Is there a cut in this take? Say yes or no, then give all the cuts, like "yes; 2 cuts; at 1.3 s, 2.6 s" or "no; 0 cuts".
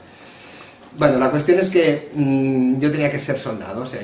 yes; 1 cut; at 1.0 s